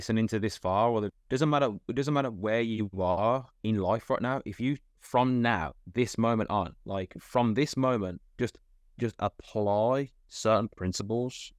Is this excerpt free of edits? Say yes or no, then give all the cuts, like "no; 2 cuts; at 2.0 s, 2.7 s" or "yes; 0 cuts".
no; 2 cuts; at 1.2 s, 10.2 s